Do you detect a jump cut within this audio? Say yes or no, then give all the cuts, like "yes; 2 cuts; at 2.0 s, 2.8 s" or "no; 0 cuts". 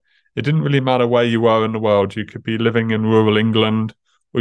no; 0 cuts